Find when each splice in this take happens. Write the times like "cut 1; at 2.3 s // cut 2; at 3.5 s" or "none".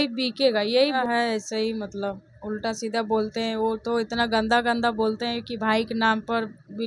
cut 1; at 1.0 s